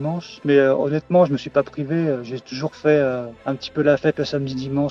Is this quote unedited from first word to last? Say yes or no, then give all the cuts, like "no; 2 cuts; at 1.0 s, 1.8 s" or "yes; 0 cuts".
yes; 0 cuts